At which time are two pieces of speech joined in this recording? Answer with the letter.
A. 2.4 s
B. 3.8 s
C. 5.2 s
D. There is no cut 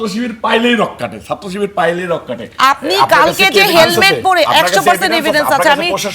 A